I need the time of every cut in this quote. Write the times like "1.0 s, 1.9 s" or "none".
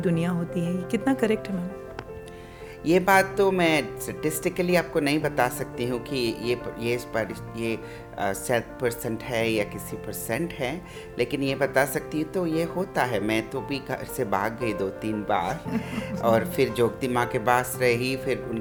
none

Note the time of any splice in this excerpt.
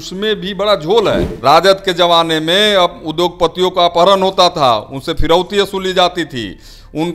1.3 s

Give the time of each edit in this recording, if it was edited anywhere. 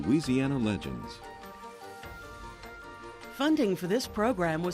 3.3 s

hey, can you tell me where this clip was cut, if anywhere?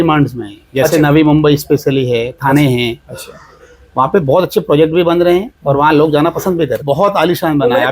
6.8 s

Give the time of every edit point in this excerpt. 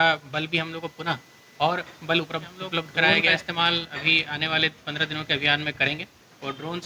3.3 s

